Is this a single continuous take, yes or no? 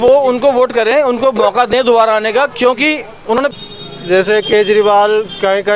no